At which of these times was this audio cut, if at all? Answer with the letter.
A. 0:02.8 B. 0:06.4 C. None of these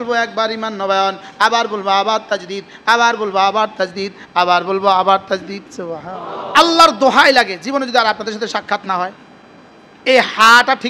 B